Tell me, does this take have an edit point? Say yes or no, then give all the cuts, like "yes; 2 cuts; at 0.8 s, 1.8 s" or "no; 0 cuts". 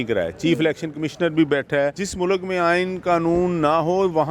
yes; 1 cut; at 2.0 s